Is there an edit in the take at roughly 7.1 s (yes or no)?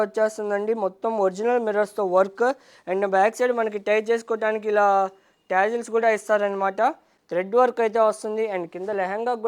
yes